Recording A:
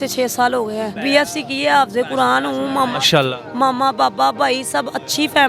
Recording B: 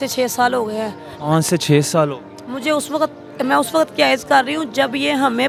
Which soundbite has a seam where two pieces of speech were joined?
A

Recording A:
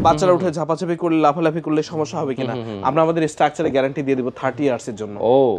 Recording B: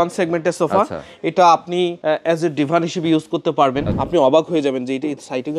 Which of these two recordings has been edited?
B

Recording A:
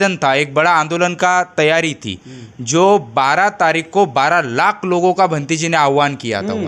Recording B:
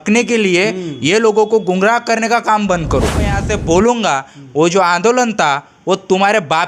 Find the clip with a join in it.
B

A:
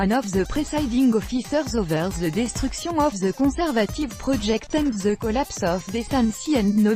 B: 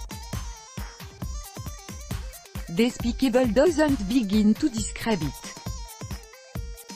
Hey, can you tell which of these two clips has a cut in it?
B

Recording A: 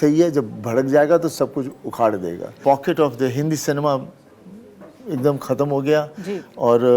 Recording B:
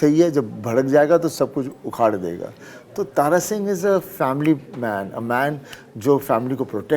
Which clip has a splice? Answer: A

